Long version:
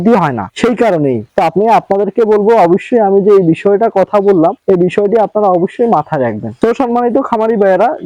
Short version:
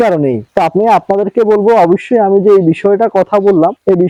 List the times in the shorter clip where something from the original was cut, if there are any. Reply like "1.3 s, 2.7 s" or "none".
none